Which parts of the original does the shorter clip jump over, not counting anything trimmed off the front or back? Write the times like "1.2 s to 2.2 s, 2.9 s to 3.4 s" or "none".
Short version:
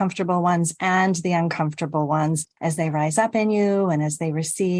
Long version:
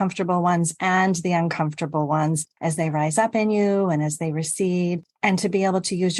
none